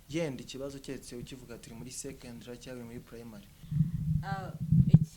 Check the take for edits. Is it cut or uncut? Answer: cut